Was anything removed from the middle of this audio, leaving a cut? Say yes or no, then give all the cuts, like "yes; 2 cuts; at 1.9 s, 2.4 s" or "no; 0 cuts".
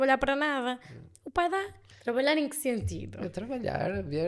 yes; 1 cut; at 1.8 s